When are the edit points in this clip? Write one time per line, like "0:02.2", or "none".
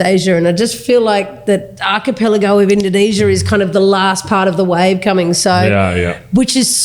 0:01.7